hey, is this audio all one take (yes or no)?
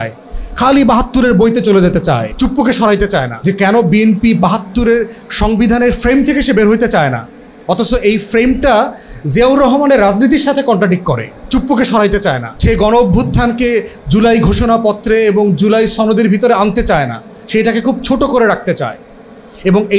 no